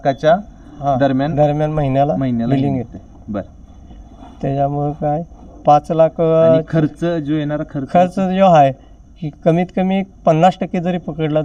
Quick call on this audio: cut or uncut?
uncut